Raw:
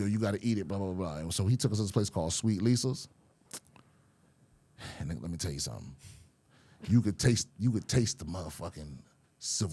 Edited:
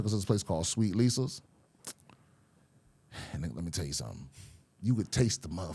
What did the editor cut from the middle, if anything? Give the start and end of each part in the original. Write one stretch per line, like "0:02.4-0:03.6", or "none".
0:06.4-0:07.5